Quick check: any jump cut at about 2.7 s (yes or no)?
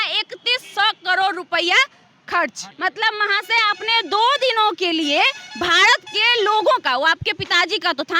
yes